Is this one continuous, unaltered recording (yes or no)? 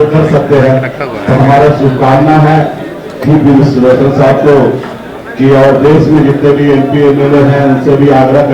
yes